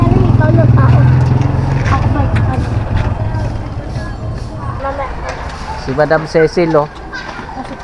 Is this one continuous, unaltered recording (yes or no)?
no